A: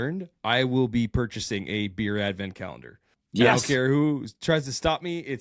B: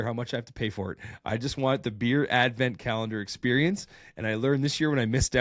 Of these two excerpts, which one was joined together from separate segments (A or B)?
A